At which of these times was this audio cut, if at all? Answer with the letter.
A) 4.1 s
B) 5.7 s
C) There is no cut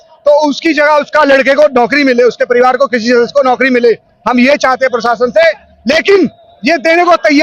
C